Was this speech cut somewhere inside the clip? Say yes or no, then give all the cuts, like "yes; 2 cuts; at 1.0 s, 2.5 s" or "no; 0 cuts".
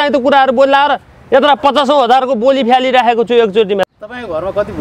yes; 1 cut; at 3.9 s